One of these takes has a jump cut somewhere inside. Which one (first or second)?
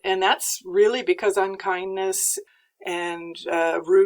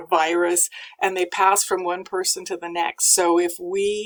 first